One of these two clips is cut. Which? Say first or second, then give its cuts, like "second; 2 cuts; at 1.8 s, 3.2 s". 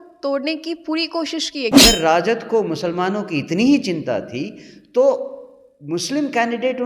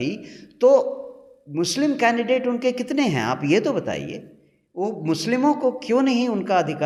first; 1 cut; at 1.7 s